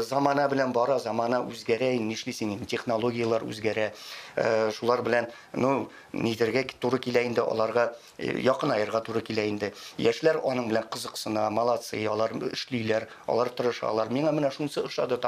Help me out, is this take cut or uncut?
uncut